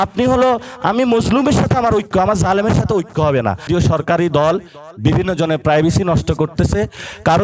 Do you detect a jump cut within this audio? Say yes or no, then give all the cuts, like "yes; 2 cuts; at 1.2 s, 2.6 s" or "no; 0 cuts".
yes; 1 cut; at 3.7 s